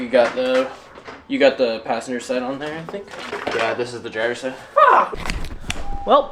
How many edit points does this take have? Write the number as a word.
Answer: two